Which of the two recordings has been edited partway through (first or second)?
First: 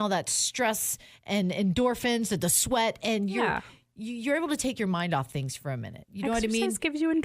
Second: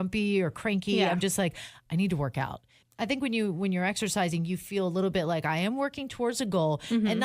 second